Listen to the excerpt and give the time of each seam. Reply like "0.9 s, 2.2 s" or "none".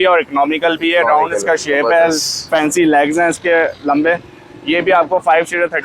none